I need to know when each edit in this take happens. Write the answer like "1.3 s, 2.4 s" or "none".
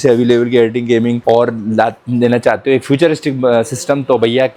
none